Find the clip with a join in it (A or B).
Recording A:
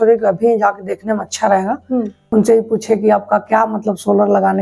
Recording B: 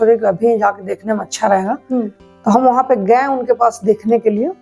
A